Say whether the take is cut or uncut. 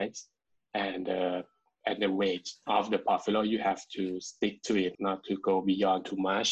cut